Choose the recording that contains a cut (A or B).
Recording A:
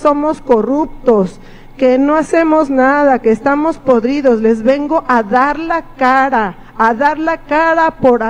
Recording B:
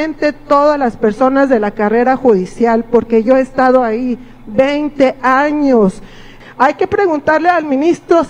B